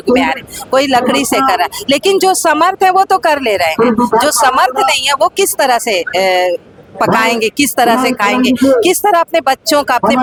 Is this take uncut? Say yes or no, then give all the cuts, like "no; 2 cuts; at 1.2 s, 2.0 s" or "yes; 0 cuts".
yes; 0 cuts